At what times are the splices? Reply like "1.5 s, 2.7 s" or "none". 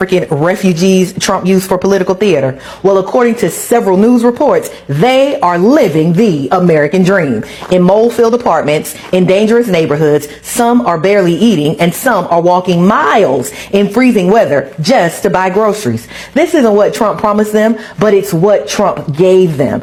none

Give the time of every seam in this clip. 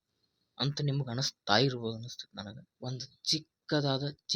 2.6 s

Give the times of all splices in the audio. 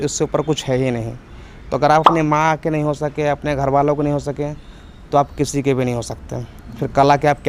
none

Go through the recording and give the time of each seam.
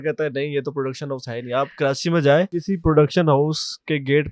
2.5 s

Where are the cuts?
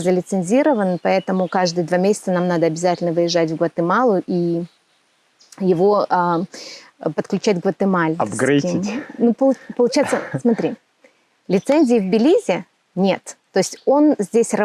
none

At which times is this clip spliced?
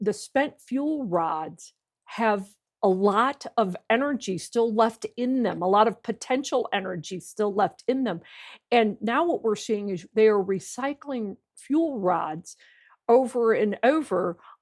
none

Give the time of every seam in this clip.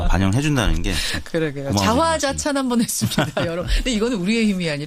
3.7 s

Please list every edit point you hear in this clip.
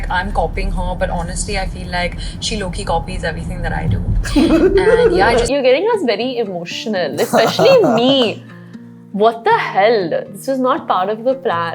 5.5 s

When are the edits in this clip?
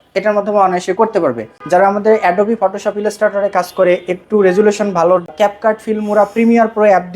1.5 s, 5.3 s

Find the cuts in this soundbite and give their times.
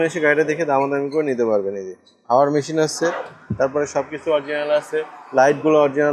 none

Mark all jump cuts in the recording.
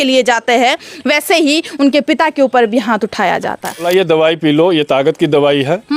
3.8 s

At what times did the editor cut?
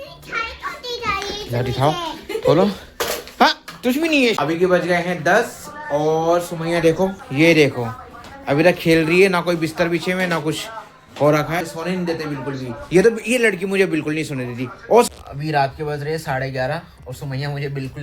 4.4 s, 11.7 s, 15.1 s

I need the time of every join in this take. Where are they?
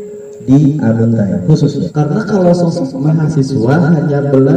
1.9 s

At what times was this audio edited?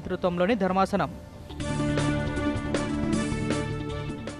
none

